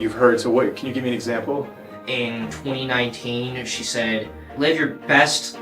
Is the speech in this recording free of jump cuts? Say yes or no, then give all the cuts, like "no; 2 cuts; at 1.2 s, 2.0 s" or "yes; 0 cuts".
no; 2 cuts; at 1.9 s, 4.5 s